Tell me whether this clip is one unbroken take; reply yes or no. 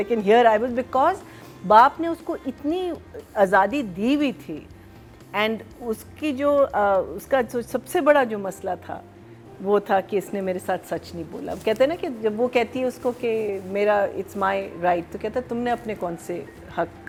yes